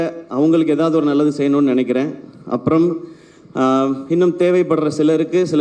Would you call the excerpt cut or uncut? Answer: uncut